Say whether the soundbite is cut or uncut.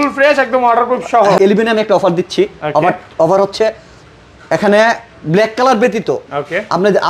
cut